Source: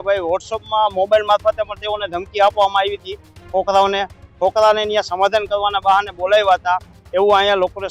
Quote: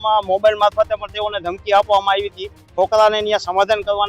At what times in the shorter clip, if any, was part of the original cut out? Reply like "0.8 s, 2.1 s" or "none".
2.6 s